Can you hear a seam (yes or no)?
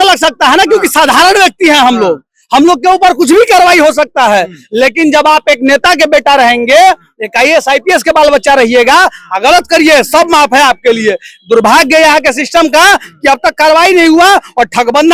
no